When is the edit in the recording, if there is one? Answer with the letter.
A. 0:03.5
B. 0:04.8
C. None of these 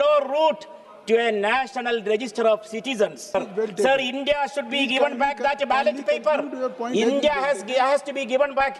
A